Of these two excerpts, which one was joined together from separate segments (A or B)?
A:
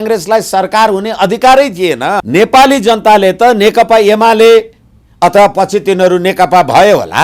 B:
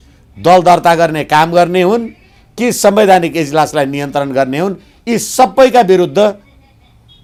A